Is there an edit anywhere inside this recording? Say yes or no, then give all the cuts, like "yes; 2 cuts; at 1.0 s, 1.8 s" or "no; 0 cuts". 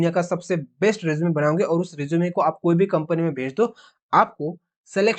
no; 0 cuts